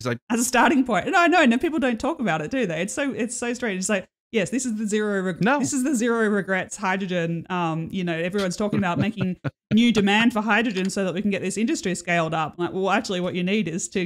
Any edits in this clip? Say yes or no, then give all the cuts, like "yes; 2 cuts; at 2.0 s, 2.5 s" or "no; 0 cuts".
no; 0 cuts